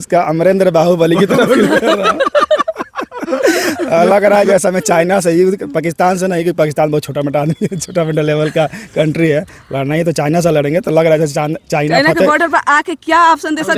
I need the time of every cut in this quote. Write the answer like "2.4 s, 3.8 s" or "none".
none